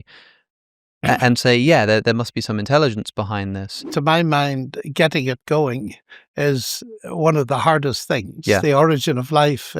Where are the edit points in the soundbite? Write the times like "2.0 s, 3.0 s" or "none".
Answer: 3.9 s